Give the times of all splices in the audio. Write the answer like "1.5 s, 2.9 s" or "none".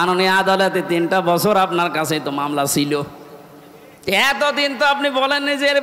none